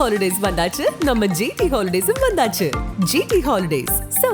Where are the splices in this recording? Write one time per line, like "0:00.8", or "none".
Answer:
none